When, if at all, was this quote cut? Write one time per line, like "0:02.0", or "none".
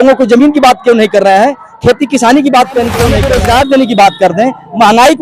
0:03.2